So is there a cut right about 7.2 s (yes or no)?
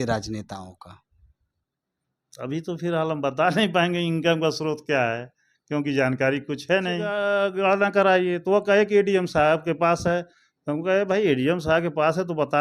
yes